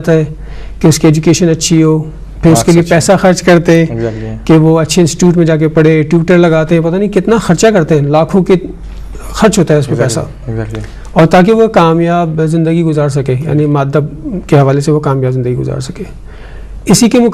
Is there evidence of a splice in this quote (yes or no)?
yes